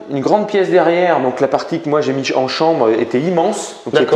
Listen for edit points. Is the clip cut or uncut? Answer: uncut